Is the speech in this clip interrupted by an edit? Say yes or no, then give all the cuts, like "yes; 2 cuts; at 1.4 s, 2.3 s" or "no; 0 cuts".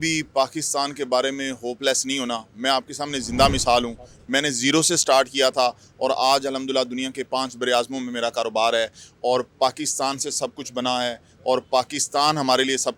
no; 0 cuts